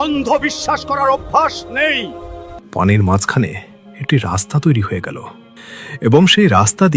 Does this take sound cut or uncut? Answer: cut